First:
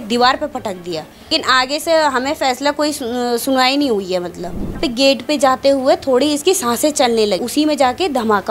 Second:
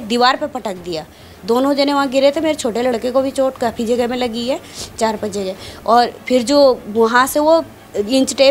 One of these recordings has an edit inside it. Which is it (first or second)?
first